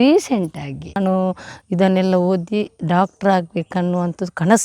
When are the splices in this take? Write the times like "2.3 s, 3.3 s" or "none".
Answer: 1.0 s